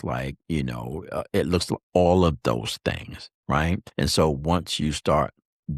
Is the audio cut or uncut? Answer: cut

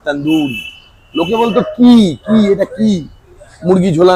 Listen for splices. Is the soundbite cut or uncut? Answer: uncut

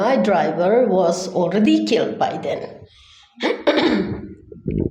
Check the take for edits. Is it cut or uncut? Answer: uncut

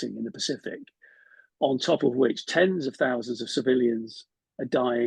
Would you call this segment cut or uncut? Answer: uncut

